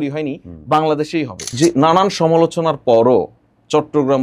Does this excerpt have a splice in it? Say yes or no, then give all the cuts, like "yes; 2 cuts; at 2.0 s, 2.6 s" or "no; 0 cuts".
yes; 1 cut; at 1.4 s